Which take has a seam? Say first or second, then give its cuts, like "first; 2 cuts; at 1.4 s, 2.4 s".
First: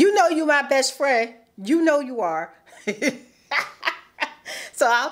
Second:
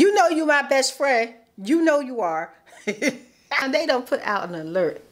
second; 1 cut; at 3.6 s